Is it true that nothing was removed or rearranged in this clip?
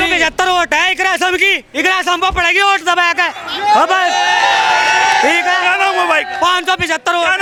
yes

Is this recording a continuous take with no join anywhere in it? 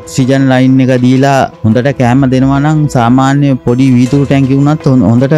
no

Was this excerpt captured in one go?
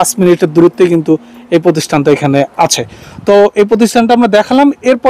yes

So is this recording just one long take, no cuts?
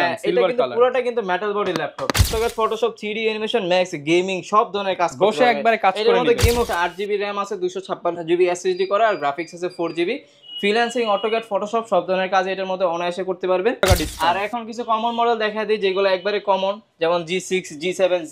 no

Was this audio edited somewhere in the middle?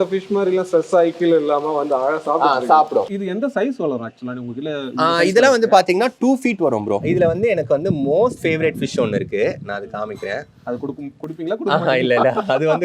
yes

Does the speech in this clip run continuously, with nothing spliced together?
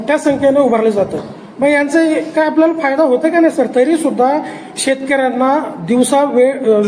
yes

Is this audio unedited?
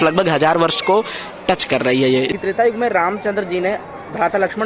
no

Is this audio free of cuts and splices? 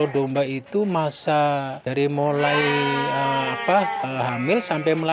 no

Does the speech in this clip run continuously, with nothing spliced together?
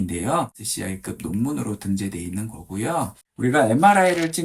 yes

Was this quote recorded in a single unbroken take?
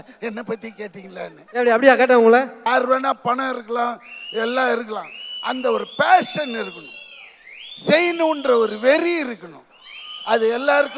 no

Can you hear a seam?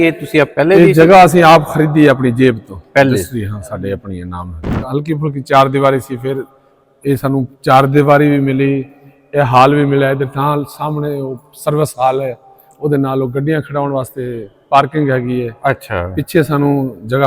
yes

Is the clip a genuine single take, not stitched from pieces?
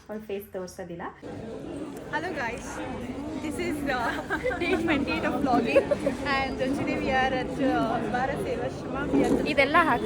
no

